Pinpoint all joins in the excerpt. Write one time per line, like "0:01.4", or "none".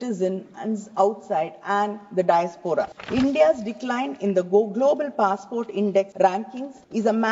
0:03.0
0:06.4